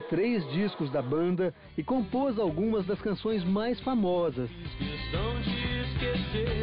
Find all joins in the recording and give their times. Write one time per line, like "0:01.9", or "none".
0:03.5